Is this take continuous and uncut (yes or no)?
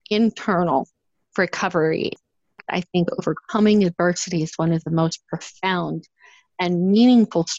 no